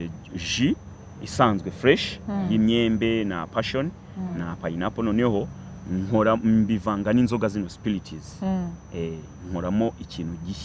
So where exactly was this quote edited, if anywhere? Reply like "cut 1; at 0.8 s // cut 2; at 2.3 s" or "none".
none

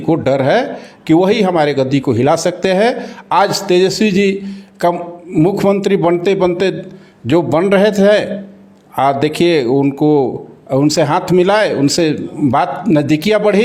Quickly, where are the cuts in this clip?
none

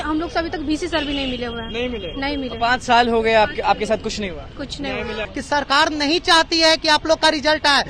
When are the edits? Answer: cut 1; at 5.3 s

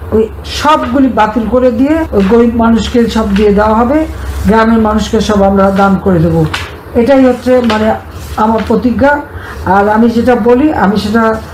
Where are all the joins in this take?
cut 1; at 2.1 s

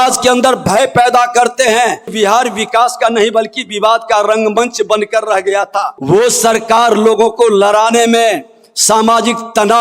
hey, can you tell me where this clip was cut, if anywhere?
cut 1; at 2.1 s // cut 2; at 5.9 s

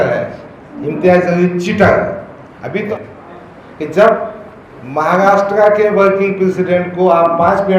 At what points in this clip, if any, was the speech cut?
cut 1; at 2.9 s

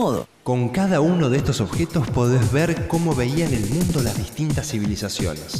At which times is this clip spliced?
cut 1; at 2.9 s

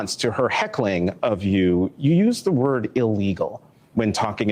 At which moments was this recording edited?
cut 1; at 3.6 s

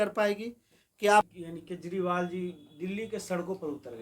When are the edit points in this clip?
cut 1; at 1.4 s

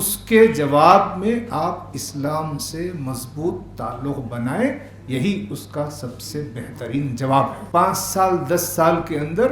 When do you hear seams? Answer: cut 1; at 7.6 s

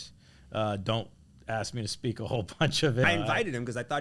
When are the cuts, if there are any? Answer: cut 1; at 3.0 s

